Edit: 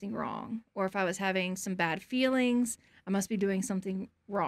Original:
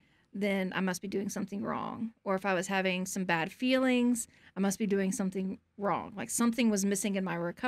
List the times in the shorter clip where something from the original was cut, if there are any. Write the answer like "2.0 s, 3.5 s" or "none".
none